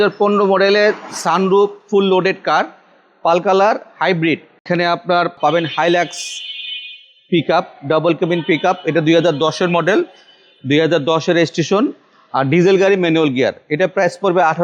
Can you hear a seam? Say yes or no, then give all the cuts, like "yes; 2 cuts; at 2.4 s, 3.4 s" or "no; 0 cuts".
yes; 1 cut; at 4.5 s